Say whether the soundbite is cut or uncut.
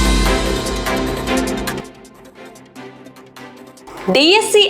cut